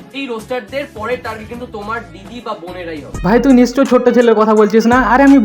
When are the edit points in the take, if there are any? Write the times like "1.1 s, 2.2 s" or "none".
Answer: 3.1 s